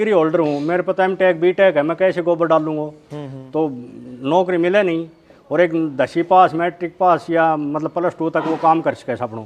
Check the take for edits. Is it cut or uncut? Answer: uncut